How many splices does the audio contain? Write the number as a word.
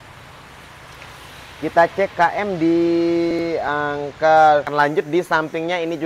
one